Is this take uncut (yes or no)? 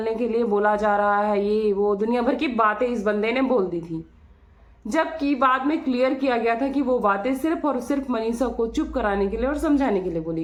yes